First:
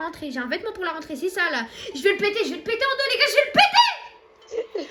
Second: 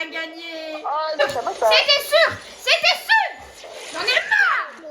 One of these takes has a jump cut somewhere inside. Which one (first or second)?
second